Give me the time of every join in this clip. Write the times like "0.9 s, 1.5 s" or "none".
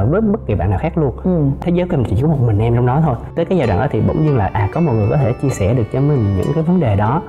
1.6 s, 3.2 s